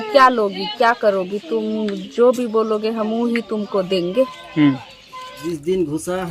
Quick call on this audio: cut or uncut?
cut